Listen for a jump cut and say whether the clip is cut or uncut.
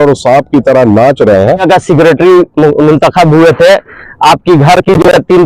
cut